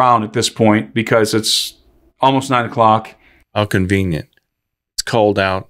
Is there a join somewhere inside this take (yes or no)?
no